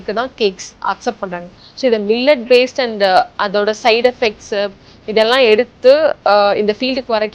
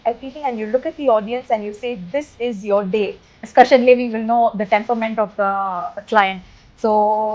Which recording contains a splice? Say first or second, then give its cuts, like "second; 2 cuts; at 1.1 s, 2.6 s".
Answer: second; 1 cut; at 3.4 s